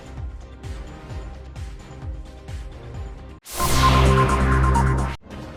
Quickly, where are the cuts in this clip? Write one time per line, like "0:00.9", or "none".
none